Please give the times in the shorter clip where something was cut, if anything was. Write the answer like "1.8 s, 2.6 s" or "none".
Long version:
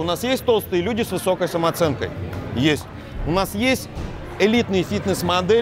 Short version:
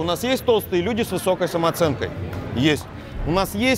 none